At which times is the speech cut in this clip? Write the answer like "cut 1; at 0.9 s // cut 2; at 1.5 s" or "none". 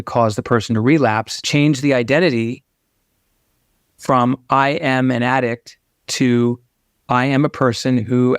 cut 1; at 1.3 s